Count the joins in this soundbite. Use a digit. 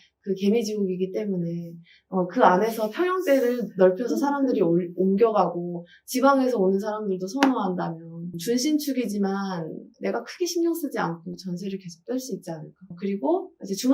1